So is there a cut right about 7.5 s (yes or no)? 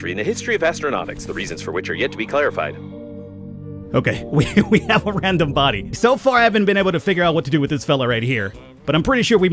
no